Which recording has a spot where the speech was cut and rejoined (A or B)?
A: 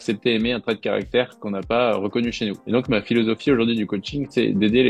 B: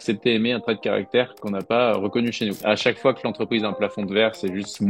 B